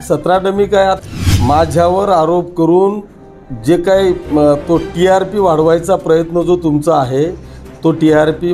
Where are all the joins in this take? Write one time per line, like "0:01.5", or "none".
0:01.0